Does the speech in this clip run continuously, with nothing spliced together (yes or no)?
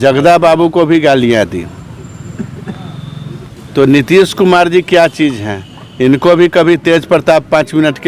yes